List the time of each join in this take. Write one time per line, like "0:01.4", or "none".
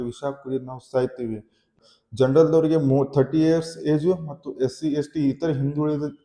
0:01.7